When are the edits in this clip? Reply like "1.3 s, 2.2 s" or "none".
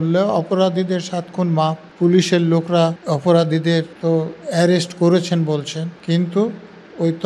1.8 s, 3.0 s, 3.9 s, 5.9 s